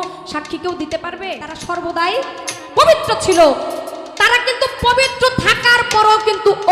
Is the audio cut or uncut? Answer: cut